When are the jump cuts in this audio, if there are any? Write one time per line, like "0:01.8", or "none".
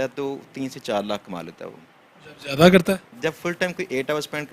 none